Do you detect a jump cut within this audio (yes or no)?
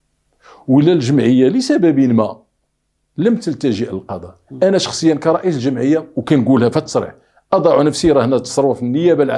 no